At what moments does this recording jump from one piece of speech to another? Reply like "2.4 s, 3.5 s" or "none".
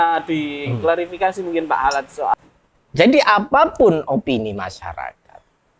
2.3 s